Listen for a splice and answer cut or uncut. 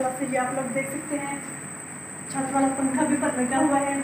uncut